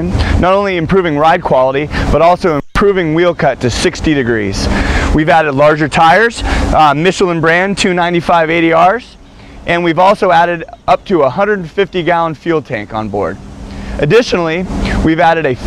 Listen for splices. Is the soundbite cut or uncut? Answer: cut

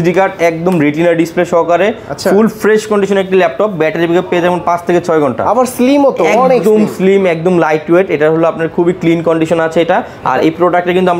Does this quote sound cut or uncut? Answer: uncut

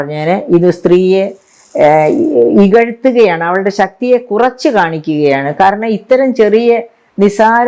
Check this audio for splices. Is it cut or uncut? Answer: uncut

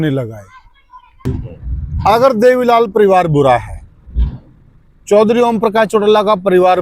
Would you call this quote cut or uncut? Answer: cut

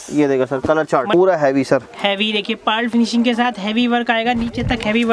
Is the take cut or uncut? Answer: cut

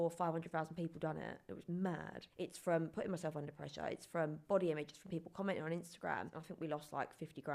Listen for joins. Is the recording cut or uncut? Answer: cut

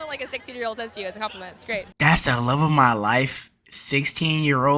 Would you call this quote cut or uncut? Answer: uncut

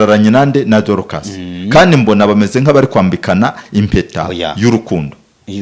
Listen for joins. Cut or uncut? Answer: uncut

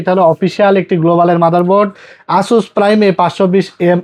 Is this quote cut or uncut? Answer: uncut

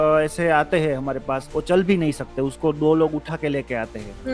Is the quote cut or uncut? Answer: cut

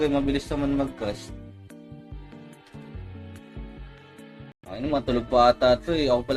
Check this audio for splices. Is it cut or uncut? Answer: uncut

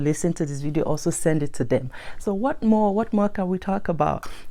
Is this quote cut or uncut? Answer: uncut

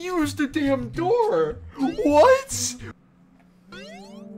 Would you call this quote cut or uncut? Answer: cut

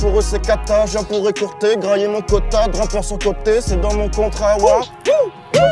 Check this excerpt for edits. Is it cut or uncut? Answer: uncut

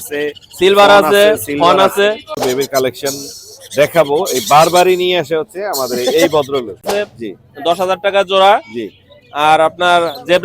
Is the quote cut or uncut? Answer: cut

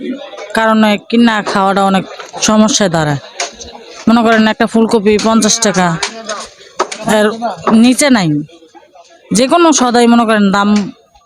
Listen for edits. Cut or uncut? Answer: uncut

